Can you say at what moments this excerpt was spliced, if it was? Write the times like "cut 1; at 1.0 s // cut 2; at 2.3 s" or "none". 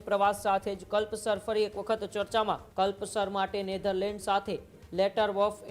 cut 1; at 2.7 s